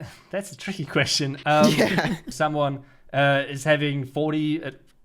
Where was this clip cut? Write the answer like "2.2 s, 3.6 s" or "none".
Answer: 2.3 s